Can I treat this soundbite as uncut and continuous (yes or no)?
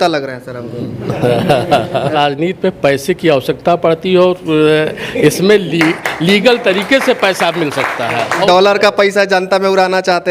no